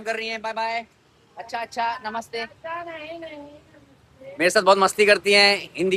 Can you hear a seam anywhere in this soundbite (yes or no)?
no